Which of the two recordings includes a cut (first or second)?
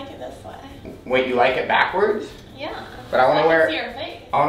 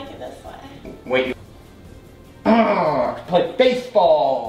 second